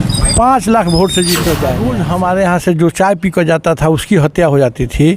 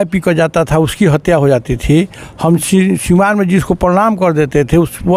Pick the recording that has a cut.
first; 1 cut; at 1.8 s

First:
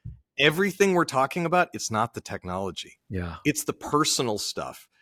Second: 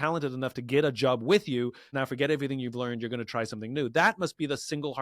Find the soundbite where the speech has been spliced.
second; 1 cut; at 1.9 s

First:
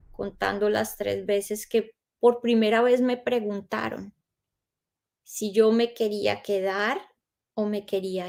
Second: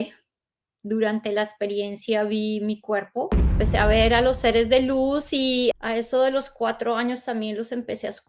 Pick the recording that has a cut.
second; 1 cut; at 3.6 s

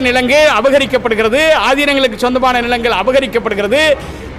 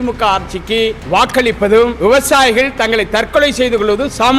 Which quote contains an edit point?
second; 2 cuts; at 1.0 s, 2.0 s

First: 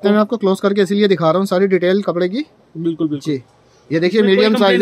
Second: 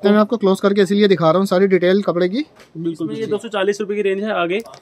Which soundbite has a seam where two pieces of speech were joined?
second; 1 cut; at 3.1 s

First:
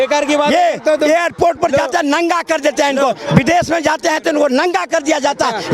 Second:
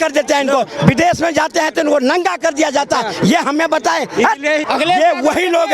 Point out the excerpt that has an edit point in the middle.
second; 1 cut; at 4.6 s

